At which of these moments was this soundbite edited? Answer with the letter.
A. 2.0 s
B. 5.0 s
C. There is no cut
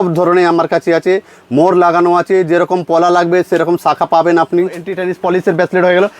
B